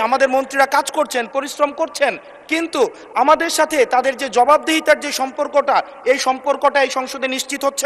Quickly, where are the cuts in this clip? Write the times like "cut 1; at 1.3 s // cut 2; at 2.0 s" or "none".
none